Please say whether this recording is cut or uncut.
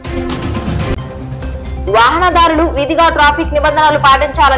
uncut